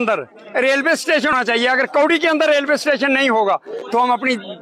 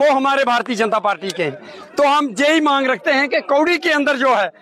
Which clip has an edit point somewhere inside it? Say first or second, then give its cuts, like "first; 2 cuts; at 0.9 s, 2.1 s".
first; 1 cut; at 1.3 s